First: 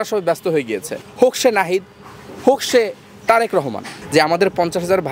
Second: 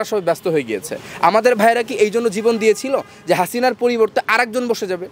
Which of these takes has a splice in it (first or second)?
first